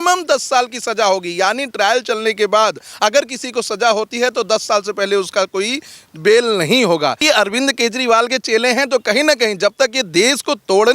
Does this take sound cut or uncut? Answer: cut